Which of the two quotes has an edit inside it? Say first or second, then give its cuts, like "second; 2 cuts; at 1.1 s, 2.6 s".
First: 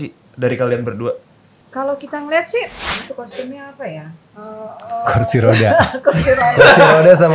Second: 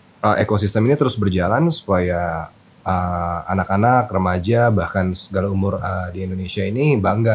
first; 1 cut; at 2.8 s